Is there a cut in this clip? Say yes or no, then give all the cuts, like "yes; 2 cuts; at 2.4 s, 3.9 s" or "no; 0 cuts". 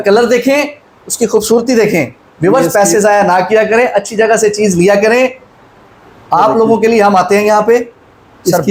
no; 0 cuts